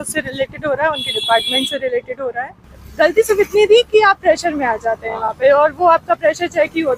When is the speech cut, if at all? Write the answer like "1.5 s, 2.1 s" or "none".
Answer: 2.8 s

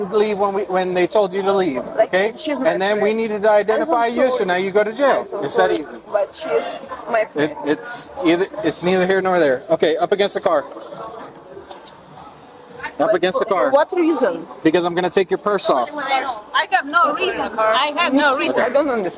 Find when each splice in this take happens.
none

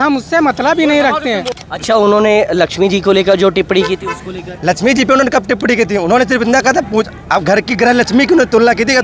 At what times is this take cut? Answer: 1.6 s

